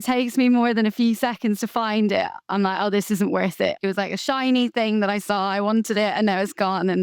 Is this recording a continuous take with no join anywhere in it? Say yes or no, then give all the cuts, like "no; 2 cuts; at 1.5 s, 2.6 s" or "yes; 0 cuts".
no; 2 cuts; at 2.5 s, 3.8 s